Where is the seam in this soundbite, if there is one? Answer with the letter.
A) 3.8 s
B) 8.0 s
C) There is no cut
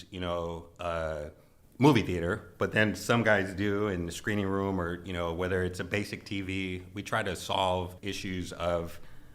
B